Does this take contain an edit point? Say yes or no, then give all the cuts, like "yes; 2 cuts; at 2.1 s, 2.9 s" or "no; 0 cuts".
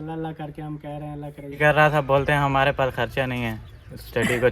yes; 1 cut; at 1.6 s